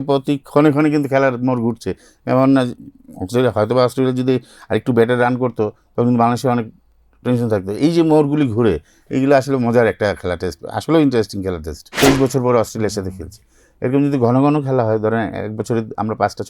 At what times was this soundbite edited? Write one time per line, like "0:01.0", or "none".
0:11.9